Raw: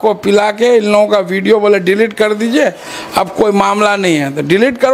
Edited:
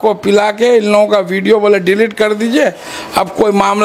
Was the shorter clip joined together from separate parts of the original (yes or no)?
no